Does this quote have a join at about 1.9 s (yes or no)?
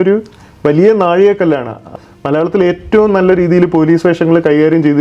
yes